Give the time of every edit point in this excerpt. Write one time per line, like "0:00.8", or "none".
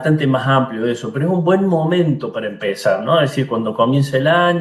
none